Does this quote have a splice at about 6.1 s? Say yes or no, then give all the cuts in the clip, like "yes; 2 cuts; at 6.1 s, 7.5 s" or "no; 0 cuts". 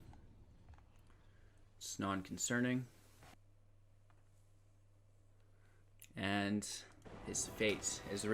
no; 1 cut; at 3.3 s